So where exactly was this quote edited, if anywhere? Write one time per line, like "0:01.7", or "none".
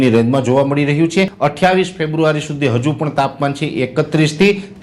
0:01.3